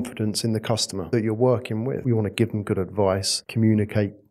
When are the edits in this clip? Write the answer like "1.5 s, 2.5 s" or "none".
1.0 s, 2.0 s, 3.4 s